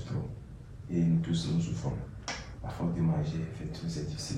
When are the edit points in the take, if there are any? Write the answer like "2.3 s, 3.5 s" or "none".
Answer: none